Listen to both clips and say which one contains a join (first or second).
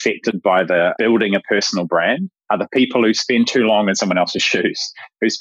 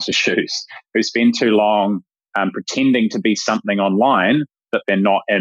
first